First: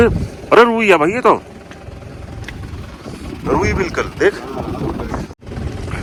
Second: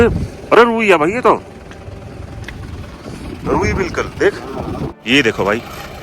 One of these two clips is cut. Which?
second; 1 cut; at 4.9 s

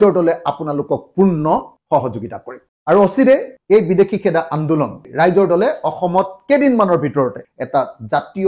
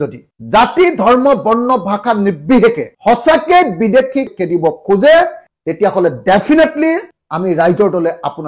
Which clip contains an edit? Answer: first; 3 cuts; at 3.6 s, 5.1 s, 7.5 s

